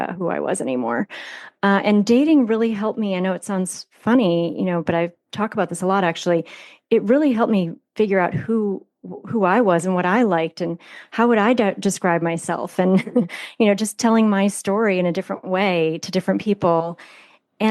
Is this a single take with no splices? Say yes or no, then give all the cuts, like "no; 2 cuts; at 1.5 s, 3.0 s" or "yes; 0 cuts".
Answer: yes; 0 cuts